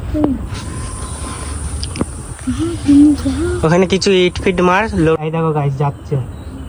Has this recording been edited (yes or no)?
no